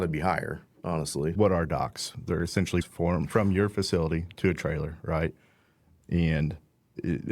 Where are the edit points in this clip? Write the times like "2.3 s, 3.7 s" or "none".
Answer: 1.3 s, 2.9 s